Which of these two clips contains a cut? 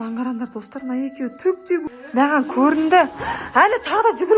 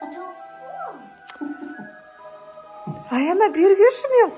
first; 1 cut; at 1.9 s

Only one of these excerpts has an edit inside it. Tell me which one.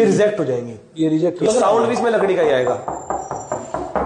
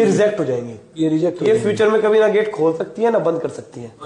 first; 1 cut; at 1.5 s

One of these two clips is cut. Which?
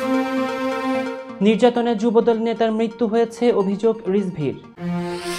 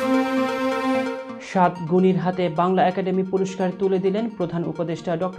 second; 1 cut; at 1.2 s

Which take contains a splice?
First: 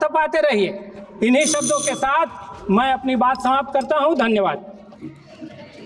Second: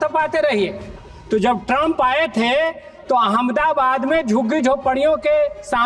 second; 1 cut; at 1.0 s

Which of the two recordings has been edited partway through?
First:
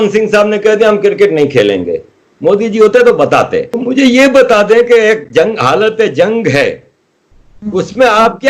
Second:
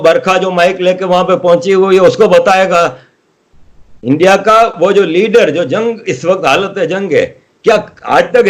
first; 1 cut; at 3.7 s

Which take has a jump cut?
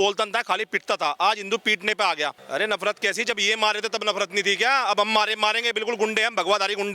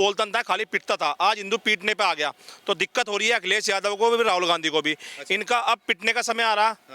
first; 1 cut; at 2.4 s

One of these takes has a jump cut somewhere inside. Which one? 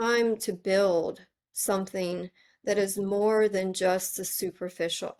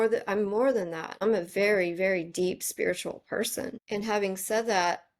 second; 2 cuts; at 1.1 s, 3.8 s

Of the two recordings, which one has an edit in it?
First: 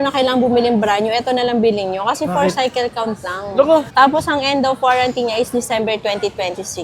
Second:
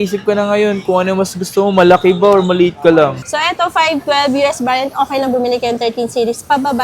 second; 1 cut; at 3.2 s

